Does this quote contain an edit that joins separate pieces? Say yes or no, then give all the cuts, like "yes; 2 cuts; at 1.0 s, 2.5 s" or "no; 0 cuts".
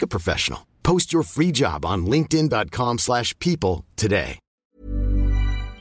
yes; 1 cut; at 4.8 s